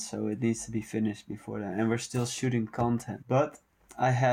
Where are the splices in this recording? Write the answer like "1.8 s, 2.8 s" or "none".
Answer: 3.2 s